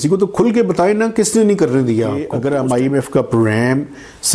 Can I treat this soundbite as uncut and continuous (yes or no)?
no